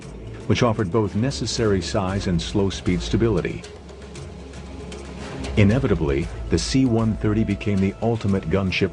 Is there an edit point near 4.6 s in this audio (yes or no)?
no